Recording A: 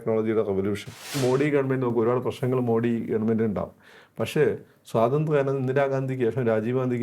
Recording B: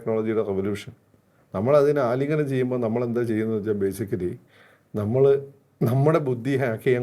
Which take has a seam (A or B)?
A